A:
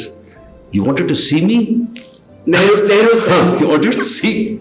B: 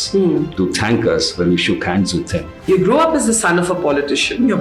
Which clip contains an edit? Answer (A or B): B